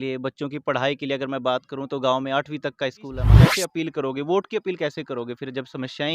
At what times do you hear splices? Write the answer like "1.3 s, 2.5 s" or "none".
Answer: 3.5 s